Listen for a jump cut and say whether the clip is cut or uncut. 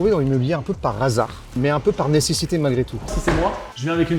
cut